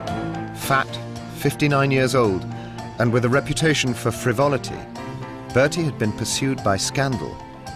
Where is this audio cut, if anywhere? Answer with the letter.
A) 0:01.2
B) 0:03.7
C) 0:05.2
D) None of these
A